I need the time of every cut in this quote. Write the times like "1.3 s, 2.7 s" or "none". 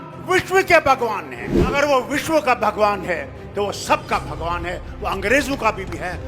1.6 s

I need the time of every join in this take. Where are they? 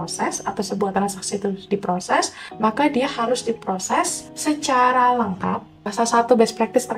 2.4 s, 4.2 s, 5.8 s

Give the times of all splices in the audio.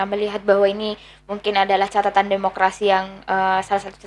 none

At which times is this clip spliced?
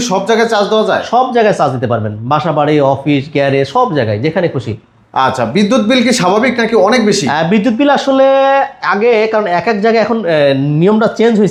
none

